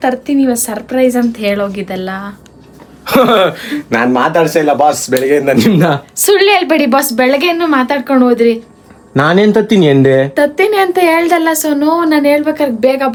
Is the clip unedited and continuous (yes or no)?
yes